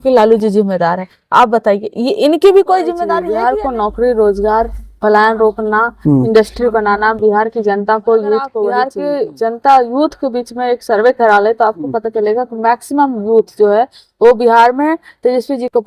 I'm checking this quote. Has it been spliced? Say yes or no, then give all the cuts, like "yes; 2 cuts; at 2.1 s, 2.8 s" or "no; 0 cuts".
yes; 2 cuts; at 3.2 s, 8.9 s